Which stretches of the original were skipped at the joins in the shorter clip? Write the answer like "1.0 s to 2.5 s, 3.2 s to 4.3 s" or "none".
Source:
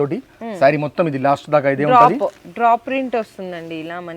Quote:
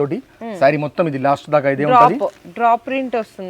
none